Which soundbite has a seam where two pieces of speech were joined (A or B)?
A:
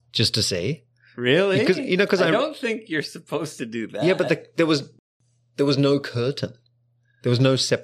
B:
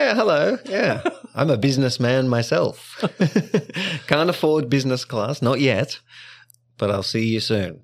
A